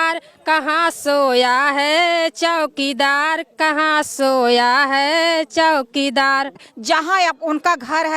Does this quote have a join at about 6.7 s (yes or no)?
yes